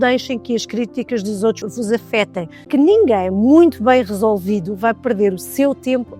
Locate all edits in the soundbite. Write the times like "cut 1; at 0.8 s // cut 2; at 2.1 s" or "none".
cut 1; at 1.6 s // cut 2; at 2.7 s